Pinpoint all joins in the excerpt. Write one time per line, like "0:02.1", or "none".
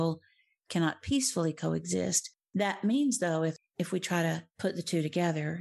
0:03.6
0:04.5